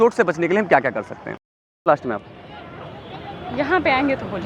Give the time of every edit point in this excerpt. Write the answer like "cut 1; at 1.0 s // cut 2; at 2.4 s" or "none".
cut 1; at 1.9 s